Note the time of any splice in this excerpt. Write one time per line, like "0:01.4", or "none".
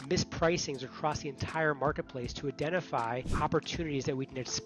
0:03.3